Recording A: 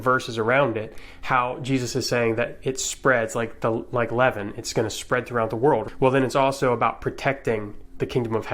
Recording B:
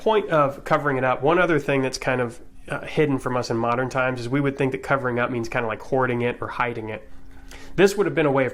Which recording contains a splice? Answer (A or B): A